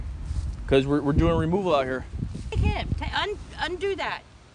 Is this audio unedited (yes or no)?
no